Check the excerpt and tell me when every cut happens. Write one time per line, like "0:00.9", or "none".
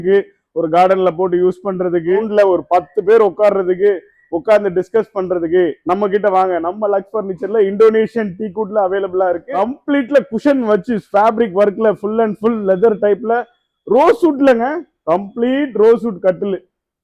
0:02.3
0:09.5